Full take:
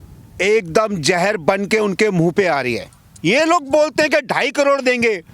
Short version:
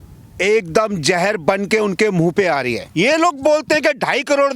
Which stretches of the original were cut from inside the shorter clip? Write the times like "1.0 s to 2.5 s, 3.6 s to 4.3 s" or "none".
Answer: 2.8 s to 3.1 s